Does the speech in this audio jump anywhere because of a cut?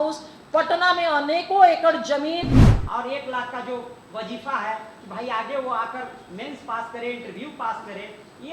yes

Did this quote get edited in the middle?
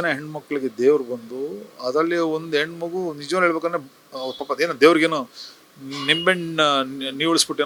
no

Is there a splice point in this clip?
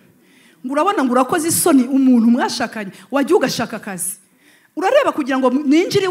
no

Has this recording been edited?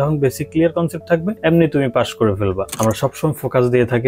yes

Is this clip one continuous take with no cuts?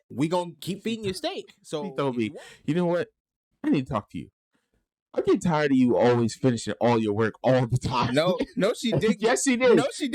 no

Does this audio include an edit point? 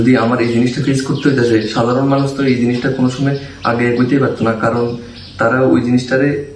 no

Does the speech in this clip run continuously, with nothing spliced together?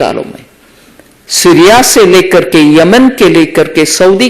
yes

